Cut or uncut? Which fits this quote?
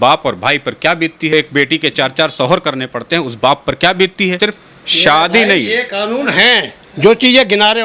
cut